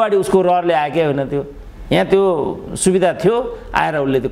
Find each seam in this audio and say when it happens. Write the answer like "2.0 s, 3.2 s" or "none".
none